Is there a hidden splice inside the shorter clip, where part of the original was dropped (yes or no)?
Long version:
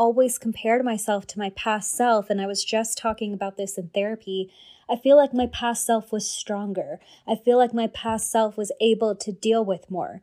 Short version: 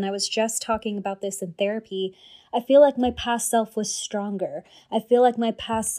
no